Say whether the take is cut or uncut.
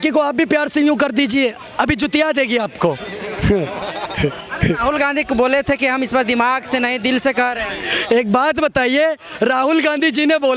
uncut